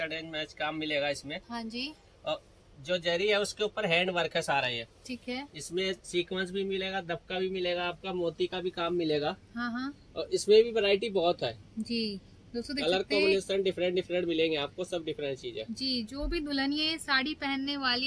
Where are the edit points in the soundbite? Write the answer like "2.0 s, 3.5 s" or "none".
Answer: none